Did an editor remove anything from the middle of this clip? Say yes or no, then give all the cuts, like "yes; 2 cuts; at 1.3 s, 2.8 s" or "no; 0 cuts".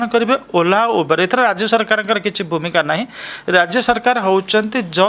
no; 0 cuts